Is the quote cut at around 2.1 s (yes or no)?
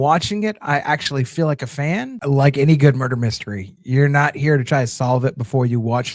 yes